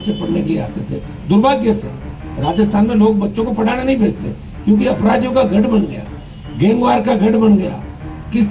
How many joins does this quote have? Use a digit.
0